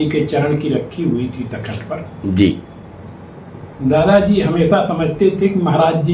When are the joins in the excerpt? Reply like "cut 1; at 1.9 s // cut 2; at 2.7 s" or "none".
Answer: none